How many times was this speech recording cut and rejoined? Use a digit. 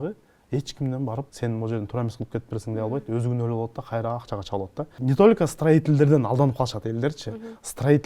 2